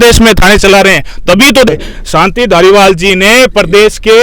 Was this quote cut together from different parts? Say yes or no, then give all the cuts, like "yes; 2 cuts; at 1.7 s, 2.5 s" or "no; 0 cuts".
yes; 1 cut; at 1.7 s